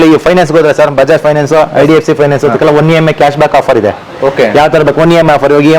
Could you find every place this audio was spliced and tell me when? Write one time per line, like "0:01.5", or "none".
none